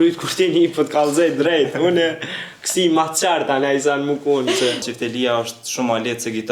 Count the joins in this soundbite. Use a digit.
1